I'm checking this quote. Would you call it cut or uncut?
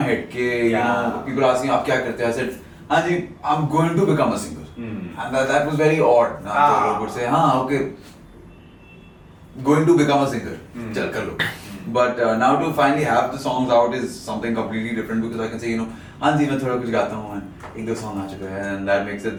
uncut